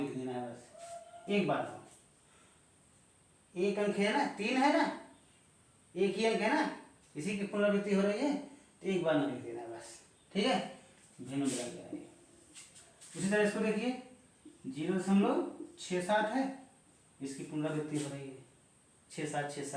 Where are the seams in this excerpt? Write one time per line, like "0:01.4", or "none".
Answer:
none